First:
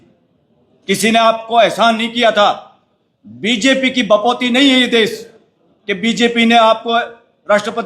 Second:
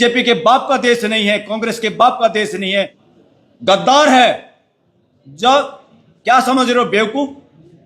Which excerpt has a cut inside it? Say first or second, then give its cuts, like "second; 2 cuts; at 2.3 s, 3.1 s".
second; 1 cut; at 3.0 s